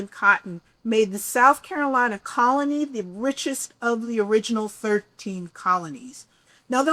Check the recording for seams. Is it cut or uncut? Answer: uncut